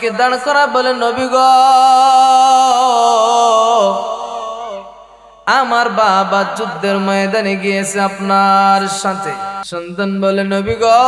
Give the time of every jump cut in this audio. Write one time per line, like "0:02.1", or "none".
0:09.7